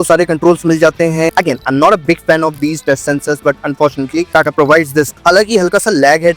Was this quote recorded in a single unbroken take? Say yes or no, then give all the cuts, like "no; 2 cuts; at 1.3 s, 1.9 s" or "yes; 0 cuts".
no; 1 cut; at 5.2 s